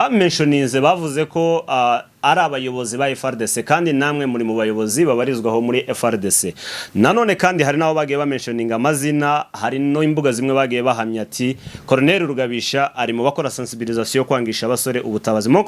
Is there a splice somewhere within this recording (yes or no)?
no